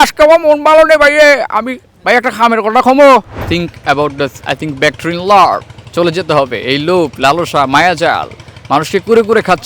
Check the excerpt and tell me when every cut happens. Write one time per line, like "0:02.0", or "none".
0:03.4